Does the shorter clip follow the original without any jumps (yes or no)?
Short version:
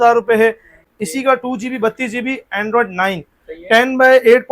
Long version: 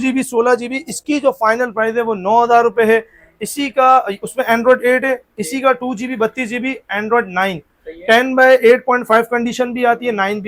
no